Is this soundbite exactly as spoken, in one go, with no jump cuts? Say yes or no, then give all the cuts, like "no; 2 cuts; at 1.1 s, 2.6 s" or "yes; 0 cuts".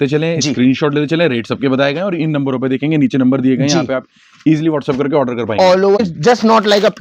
no; 1 cut; at 6.0 s